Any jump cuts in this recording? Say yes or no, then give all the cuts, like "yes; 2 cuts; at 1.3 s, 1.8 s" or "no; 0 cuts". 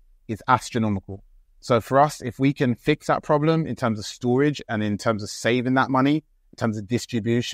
no; 0 cuts